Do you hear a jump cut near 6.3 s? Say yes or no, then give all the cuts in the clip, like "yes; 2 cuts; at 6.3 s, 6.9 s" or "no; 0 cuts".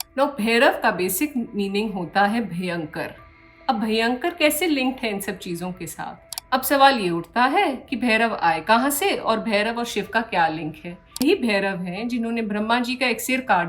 yes; 2 cuts; at 6.3 s, 11.2 s